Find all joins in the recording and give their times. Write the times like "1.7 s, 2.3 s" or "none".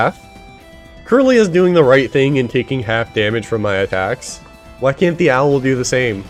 none